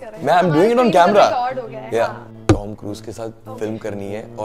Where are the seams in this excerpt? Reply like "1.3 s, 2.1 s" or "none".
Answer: 2.3 s